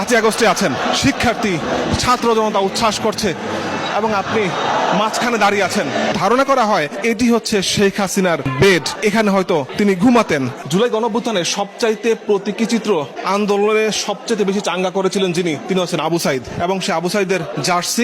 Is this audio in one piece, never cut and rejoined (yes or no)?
no